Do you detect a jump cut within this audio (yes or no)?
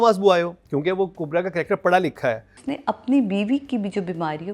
yes